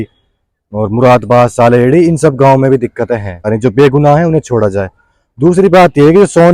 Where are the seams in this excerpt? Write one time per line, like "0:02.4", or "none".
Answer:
0:03.5